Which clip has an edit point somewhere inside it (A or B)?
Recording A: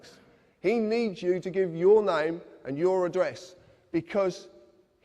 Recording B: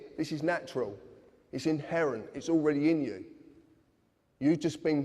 A